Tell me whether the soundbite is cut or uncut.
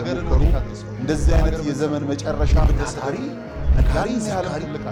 uncut